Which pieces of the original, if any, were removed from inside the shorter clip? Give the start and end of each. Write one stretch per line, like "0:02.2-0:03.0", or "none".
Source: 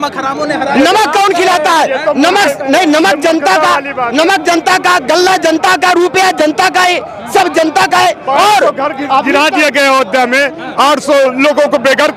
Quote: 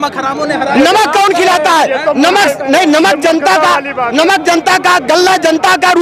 none